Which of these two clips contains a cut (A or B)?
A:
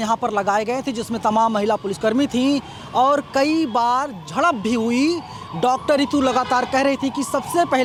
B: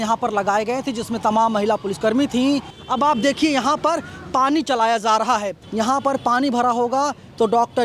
B